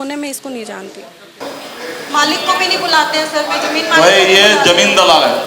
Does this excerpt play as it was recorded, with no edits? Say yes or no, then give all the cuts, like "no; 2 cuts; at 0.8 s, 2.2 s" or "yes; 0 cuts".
no; 1 cut; at 1.4 s